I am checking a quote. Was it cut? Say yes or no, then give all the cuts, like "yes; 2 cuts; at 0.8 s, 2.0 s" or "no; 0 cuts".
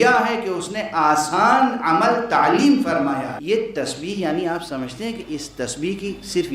yes; 1 cut; at 3.4 s